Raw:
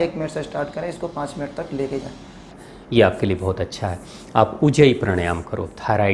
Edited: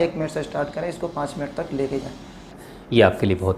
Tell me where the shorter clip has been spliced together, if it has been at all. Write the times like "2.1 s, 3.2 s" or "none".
none